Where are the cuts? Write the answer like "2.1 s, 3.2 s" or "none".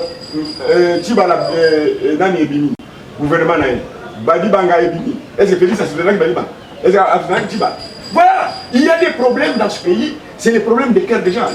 none